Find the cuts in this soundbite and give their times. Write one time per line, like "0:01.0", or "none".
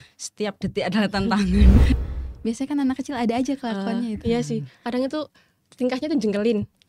0:01.9